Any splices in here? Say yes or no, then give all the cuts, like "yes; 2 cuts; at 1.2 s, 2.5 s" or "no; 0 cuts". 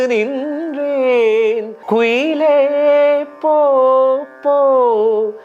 yes; 1 cut; at 1.7 s